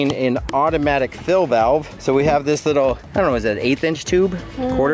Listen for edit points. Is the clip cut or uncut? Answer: uncut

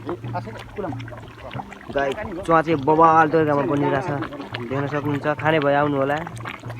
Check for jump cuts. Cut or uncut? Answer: uncut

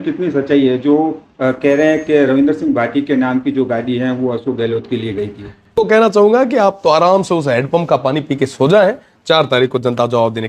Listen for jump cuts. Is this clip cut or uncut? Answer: cut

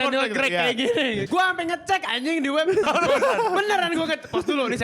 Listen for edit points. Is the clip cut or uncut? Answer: cut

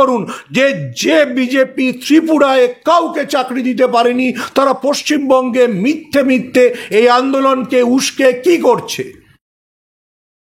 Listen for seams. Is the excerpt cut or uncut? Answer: uncut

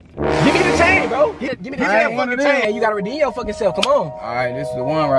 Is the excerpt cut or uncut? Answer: cut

